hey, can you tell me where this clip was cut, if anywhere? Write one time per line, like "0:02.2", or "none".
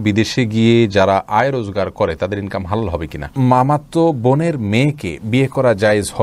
0:03.3

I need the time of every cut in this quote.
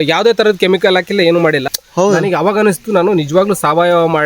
0:01.6

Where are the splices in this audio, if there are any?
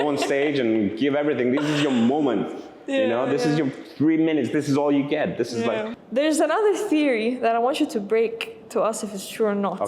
0:06.0

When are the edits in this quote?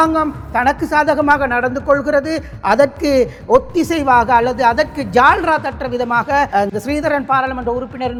none

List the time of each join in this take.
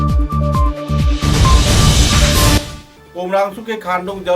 0:02.6

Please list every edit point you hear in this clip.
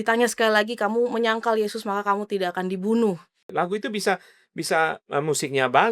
0:03.4

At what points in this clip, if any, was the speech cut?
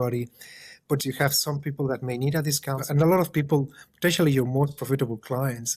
0:01.0
0:02.8

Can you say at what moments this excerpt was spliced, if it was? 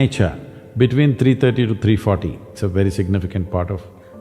0:02.5

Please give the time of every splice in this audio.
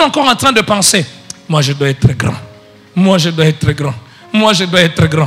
none

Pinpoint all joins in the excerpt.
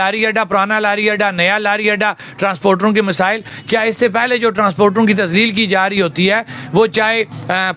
none

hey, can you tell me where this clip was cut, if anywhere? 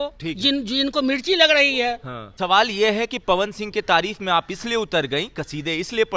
none

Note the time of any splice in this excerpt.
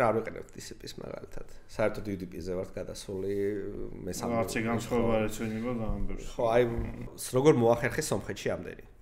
0:07.0

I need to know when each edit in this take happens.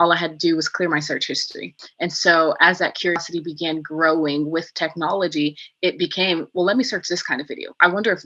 0:01.8

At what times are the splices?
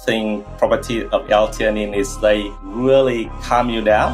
none

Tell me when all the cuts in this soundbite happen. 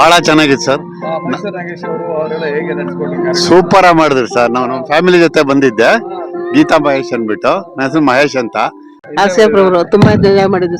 0:09.0

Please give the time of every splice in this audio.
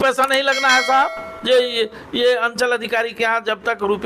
0:01.3

